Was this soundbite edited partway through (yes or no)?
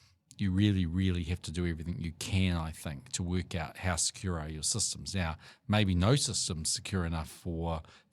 no